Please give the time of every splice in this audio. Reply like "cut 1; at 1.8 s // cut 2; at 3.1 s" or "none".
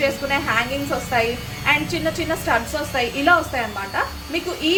none